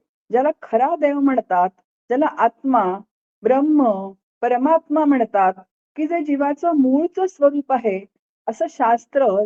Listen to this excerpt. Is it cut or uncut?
uncut